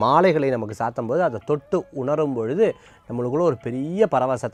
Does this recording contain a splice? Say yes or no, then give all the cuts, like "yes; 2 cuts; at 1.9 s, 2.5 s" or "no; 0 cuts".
no; 0 cuts